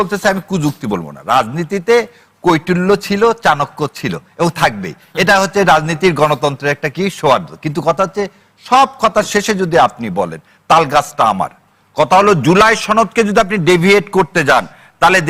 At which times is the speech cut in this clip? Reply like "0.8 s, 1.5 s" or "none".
none